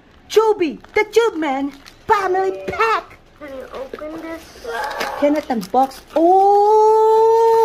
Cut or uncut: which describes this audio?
cut